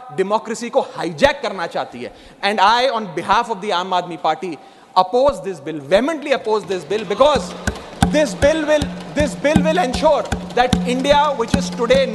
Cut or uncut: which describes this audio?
uncut